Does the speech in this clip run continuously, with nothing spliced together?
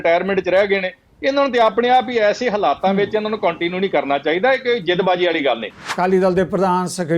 no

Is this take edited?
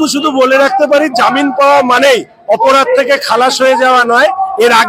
no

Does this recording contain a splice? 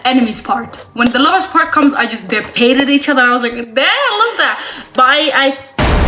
yes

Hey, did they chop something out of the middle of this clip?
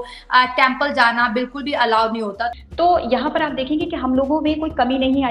yes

